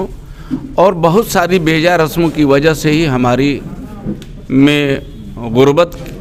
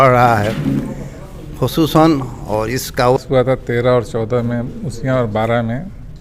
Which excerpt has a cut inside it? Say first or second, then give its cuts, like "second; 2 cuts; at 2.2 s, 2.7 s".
second; 1 cut; at 3.2 s